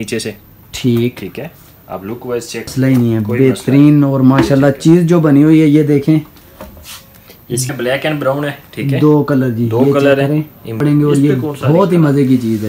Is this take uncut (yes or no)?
no